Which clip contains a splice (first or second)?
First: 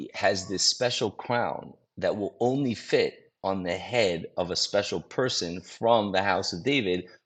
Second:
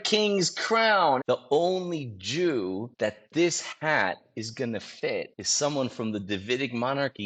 second